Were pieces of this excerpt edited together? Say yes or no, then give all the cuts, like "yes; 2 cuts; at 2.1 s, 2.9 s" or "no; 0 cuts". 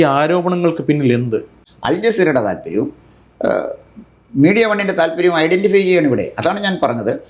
yes; 1 cut; at 1.6 s